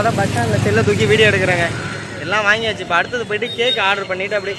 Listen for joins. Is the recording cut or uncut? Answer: uncut